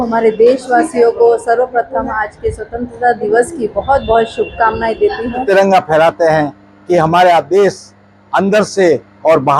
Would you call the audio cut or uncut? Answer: cut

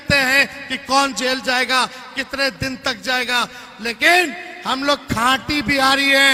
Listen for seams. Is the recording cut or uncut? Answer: uncut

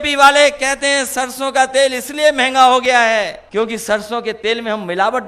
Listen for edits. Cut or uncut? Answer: cut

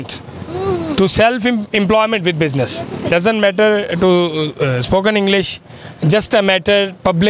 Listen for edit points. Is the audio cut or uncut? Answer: cut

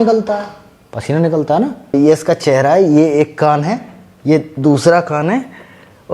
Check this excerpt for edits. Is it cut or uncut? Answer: cut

